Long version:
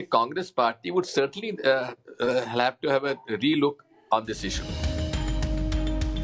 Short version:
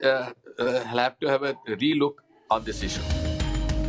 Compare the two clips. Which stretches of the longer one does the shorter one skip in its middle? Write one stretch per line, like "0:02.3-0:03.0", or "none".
0:04.5-0:04.6